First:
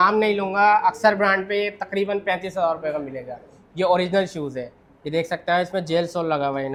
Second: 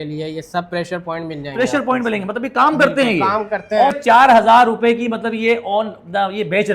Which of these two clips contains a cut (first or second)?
second